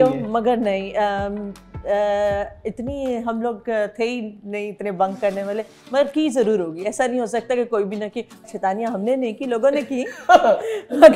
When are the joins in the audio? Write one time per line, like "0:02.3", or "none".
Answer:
0:08.4